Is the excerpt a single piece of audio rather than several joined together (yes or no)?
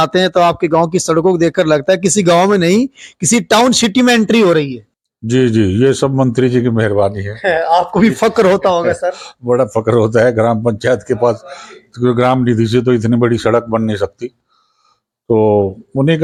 yes